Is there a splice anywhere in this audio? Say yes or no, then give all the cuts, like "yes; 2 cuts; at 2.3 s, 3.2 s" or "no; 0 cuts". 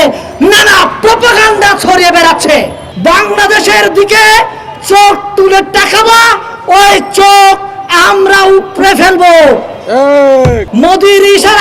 yes; 2 cuts; at 2.8 s, 10.6 s